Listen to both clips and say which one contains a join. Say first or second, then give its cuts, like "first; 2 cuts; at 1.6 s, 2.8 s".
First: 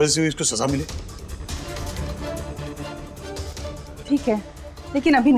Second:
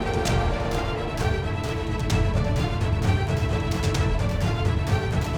first; 1 cut; at 1.6 s